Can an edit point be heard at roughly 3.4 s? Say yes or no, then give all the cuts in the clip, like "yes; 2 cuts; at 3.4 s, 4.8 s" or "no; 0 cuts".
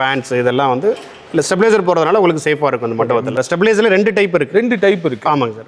yes; 1 cut; at 3.4 s